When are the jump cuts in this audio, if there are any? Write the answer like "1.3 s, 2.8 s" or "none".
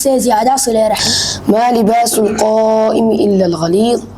1.0 s